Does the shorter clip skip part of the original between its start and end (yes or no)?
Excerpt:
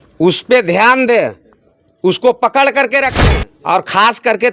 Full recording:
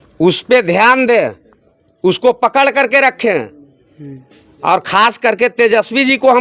yes